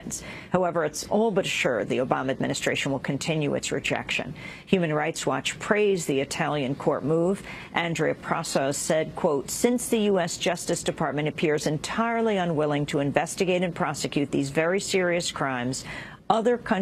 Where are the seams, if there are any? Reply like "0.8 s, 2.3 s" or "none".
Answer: 14.3 s